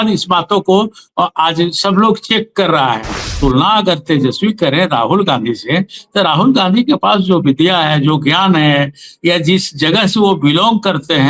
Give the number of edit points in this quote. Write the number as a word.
one